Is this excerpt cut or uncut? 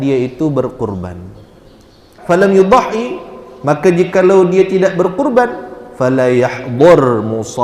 cut